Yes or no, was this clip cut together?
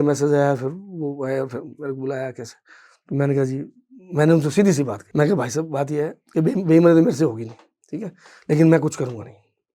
no